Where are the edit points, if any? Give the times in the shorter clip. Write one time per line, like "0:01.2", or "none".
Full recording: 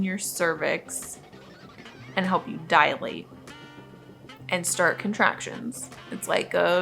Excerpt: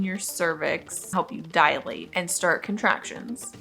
0:01.1
0:02.0